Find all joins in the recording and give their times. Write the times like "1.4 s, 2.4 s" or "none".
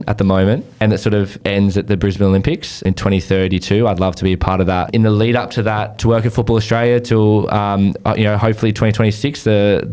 1.2 s, 2.8 s, 4.9 s, 6.0 s